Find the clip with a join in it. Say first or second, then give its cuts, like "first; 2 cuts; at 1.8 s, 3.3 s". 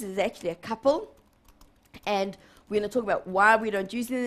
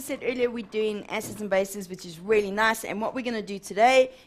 first; 1 cut; at 1.3 s